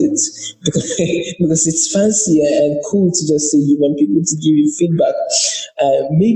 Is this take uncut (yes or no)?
yes